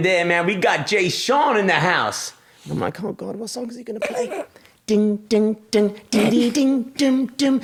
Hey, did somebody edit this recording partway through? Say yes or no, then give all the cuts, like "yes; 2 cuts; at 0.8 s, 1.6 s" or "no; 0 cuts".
no; 0 cuts